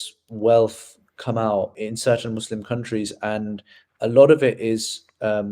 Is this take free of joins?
no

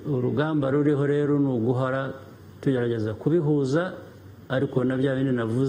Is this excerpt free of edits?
yes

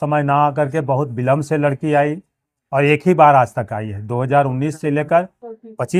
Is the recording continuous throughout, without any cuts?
yes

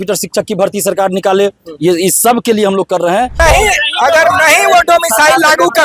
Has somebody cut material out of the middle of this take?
yes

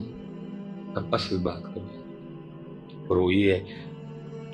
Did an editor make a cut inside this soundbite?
no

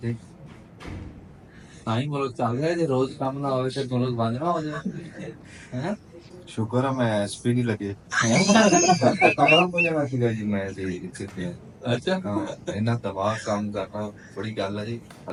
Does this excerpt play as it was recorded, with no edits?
yes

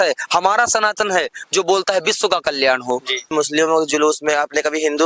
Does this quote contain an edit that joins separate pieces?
yes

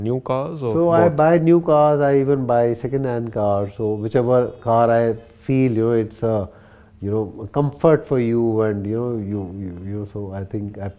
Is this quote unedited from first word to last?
yes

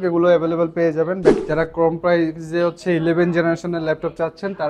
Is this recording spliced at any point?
yes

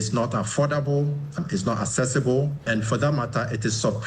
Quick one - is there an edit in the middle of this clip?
yes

